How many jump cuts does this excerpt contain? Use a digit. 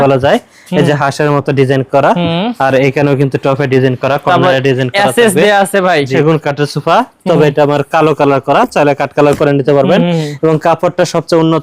1